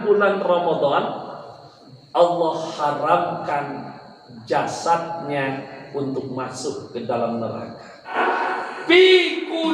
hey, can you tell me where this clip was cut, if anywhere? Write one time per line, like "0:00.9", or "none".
0:08.2